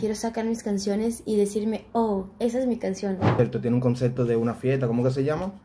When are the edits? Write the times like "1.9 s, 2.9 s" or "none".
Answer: 3.3 s